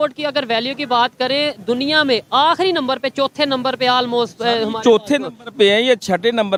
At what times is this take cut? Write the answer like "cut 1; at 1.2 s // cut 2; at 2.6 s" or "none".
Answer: none